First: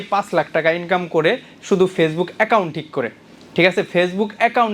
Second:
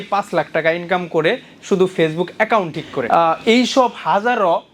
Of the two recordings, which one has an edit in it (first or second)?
second